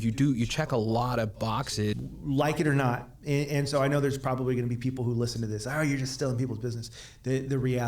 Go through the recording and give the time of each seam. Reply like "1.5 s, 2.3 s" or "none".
2.1 s